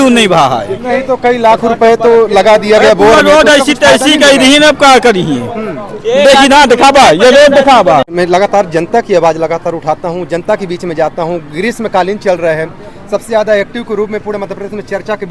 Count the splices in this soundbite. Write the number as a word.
one